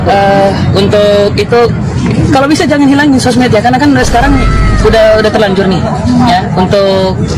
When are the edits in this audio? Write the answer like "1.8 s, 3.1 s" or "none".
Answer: none